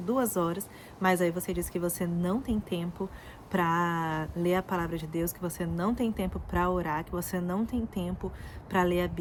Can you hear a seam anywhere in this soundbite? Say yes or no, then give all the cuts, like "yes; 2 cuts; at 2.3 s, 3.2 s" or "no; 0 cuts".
no; 0 cuts